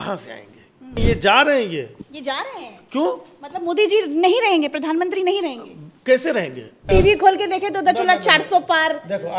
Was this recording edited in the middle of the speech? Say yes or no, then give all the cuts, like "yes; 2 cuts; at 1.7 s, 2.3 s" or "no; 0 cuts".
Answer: yes; 2 cuts; at 1.0 s, 6.8 s